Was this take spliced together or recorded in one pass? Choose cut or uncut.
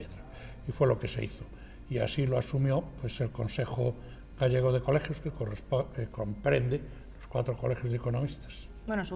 uncut